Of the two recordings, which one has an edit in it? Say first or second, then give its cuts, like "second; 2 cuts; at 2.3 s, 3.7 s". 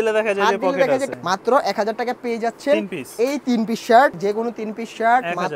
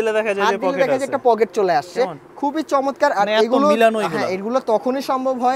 first; 2 cuts; at 1.1 s, 4.2 s